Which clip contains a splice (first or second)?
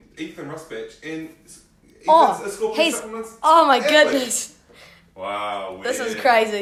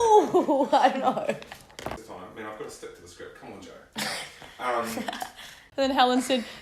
second